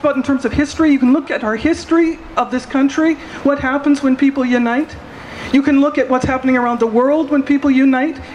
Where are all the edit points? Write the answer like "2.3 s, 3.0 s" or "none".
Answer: none

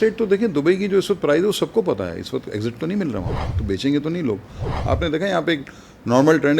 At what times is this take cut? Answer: 3.4 s, 4.7 s

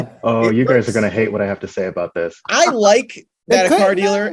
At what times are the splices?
2.4 s

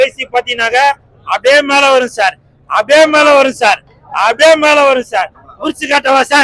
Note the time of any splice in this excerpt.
5.3 s

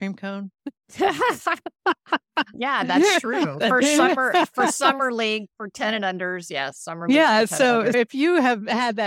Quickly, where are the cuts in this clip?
7.9 s

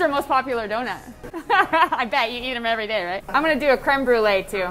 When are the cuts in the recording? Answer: 1.0 s, 3.2 s

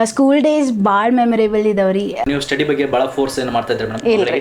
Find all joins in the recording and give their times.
2.2 s

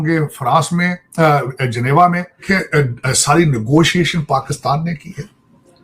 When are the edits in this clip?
2.4 s

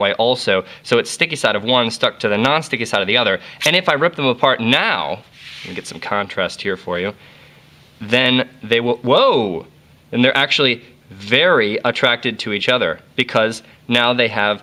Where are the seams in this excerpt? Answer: none

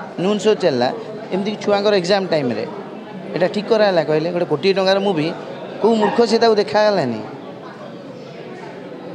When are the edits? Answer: none

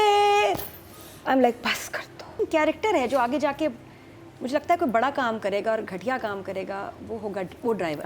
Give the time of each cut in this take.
2.2 s

